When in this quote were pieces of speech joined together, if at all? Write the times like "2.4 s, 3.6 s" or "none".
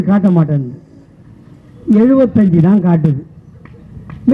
none